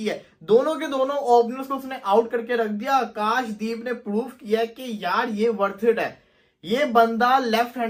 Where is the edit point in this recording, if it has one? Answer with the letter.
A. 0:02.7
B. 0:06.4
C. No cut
C